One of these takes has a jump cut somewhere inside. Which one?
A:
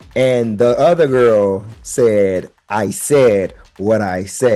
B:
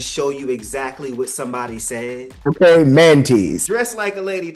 B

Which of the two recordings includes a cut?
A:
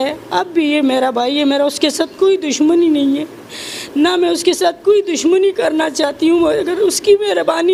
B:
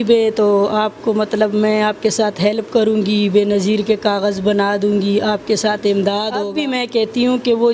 B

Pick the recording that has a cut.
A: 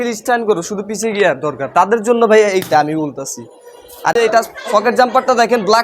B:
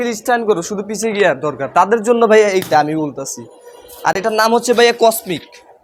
A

